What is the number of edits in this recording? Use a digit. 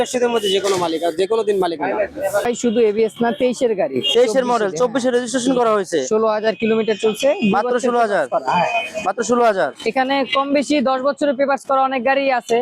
1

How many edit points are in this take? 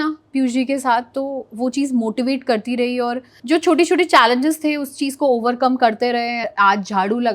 2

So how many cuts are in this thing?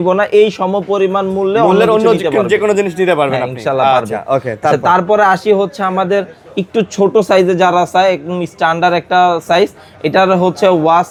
0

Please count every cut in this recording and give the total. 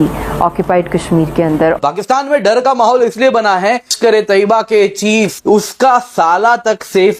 3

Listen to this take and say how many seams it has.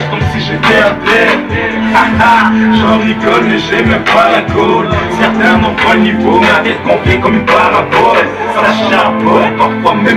1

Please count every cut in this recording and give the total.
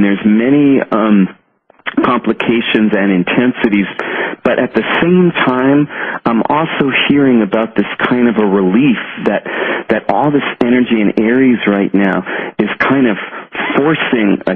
0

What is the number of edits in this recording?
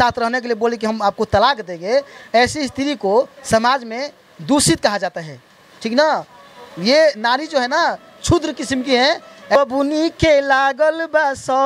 1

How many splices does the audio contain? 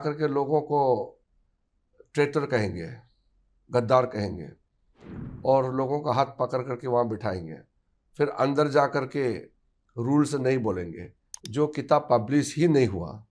0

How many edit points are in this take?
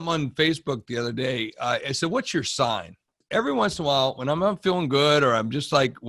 1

